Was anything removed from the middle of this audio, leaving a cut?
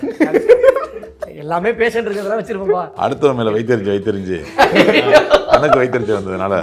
no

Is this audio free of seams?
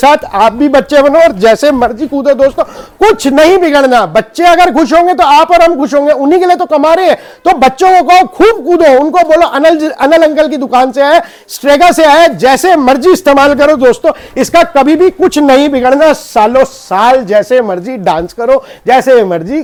yes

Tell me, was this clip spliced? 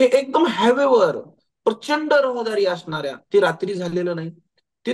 no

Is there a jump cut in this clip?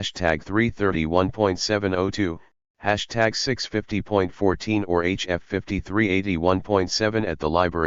no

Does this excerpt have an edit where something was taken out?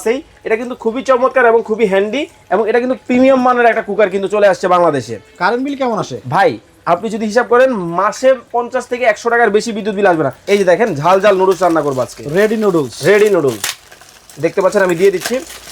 yes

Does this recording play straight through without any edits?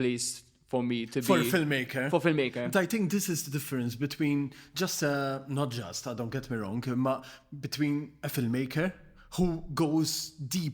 yes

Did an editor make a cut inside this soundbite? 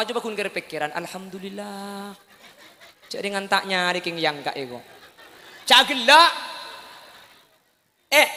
no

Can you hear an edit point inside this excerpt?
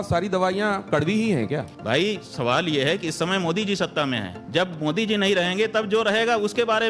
yes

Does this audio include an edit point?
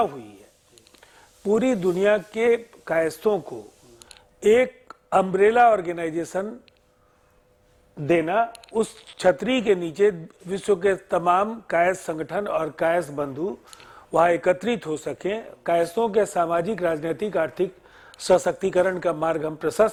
no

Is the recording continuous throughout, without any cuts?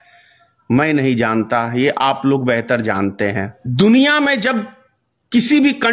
no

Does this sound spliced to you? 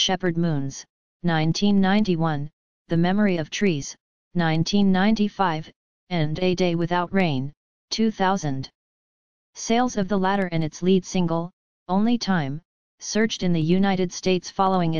yes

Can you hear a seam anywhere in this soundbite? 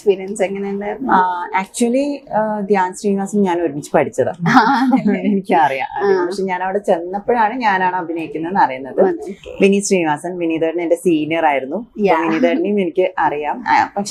no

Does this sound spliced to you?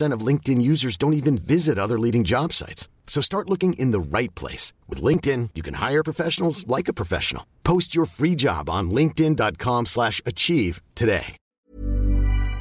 yes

